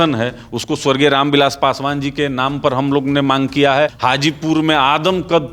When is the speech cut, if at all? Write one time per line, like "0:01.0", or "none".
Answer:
0:04.0